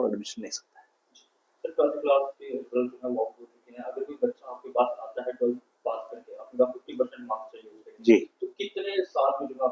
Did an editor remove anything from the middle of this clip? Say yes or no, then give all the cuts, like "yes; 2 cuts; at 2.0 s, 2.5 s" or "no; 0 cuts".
no; 0 cuts